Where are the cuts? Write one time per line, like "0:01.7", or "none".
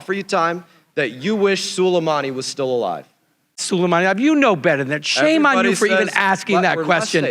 0:03.6